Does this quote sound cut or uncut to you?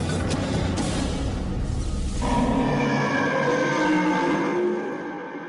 uncut